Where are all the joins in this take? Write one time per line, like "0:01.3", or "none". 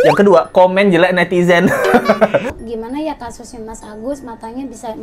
0:02.5